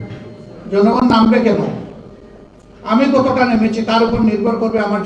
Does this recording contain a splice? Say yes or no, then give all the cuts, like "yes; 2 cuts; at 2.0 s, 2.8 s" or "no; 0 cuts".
no; 0 cuts